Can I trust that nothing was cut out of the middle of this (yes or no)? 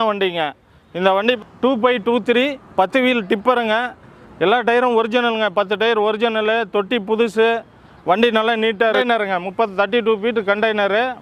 no